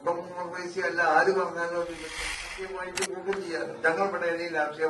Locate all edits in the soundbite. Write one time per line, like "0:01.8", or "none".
0:02.6